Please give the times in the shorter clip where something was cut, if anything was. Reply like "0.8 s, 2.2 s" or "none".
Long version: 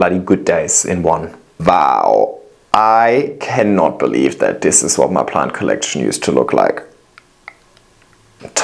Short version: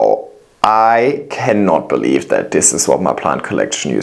none